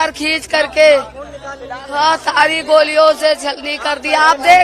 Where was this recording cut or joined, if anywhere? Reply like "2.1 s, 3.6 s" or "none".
none